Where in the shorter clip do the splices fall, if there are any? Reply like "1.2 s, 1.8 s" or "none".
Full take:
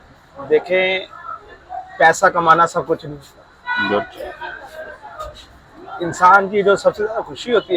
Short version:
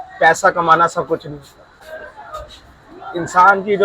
1.7 s

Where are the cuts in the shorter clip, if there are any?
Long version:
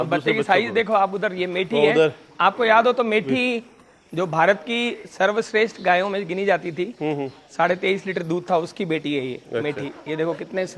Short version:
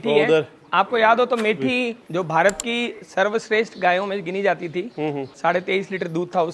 2.0 s, 5.3 s

